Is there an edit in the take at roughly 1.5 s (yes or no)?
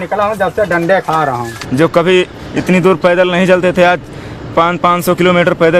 yes